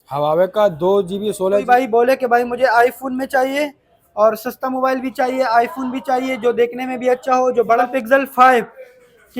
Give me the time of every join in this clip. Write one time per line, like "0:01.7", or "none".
0:01.6
0:07.8